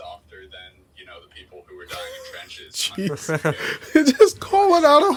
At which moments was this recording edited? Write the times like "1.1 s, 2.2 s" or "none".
none

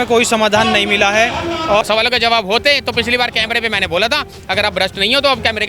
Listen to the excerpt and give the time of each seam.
1.8 s

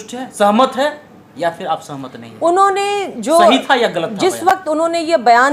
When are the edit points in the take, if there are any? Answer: none

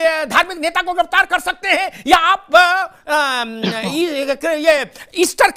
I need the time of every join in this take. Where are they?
none

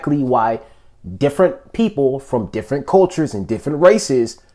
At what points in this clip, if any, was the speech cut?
none

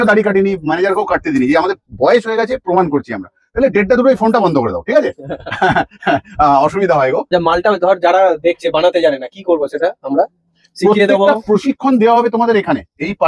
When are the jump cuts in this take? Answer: 7.3 s

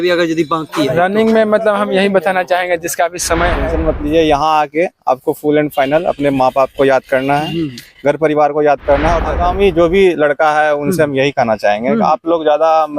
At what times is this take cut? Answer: 3.6 s, 9.2 s

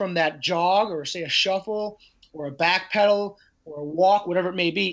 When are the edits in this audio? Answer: none

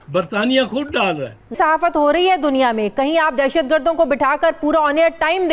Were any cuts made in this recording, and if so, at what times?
1.6 s

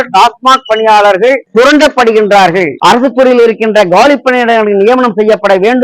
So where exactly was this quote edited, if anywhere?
2.8 s

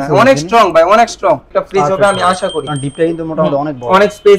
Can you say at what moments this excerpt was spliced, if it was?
1.5 s

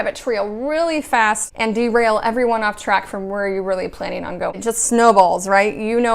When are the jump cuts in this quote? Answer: 1.5 s, 4.6 s

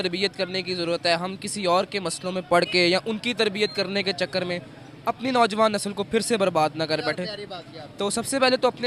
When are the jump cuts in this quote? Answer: none

